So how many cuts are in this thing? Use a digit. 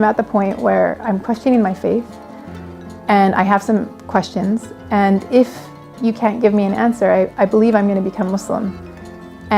0